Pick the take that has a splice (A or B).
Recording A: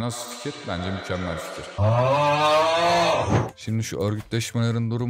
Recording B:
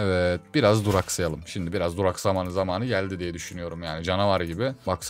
A